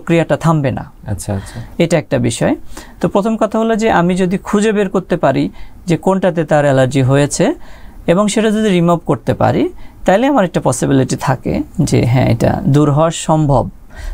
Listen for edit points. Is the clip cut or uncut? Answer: uncut